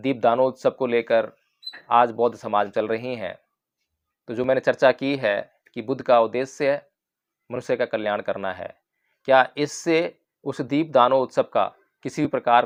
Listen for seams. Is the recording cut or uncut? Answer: uncut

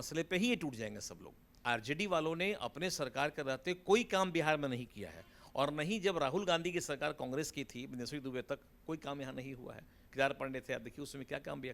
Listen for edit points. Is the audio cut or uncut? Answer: cut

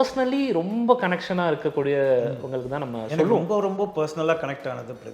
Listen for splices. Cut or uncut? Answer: uncut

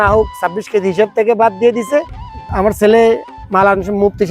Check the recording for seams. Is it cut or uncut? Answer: cut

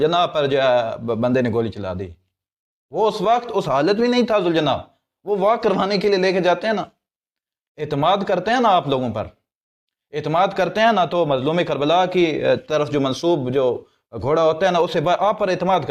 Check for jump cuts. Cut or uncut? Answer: uncut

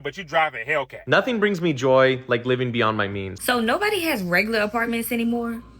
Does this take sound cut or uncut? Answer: cut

